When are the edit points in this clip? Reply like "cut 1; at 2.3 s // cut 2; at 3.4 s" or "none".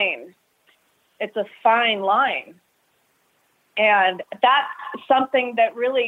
none